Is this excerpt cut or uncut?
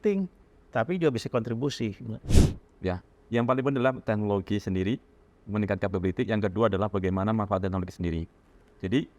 cut